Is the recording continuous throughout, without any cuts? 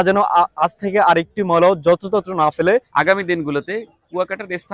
no; 1 cut; at 2.9 s

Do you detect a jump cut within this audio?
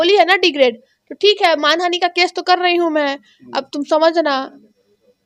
no; 0 cuts

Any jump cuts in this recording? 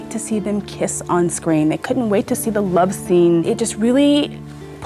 yes; 1 cut; at 3.5 s

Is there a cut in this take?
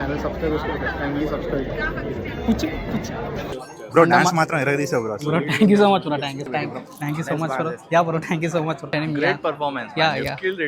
yes; 3 cuts; at 3.6 s, 6.5 s, 8.9 s

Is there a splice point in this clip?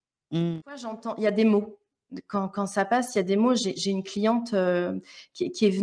yes; 1 cut; at 1.0 s

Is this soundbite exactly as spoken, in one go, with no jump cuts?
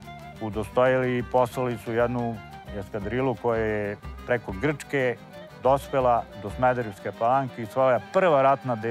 yes; 0 cuts

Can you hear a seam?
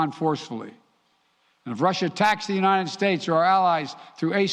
yes; 1 cut; at 2.0 s

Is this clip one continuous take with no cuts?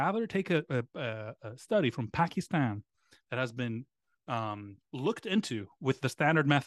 yes; 0 cuts

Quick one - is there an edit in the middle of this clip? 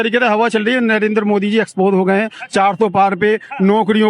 no; 0 cuts

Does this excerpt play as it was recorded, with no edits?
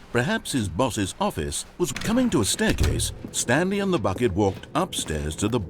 no; 1 cut; at 1.9 s

